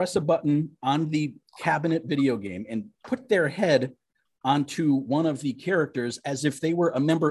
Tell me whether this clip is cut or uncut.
uncut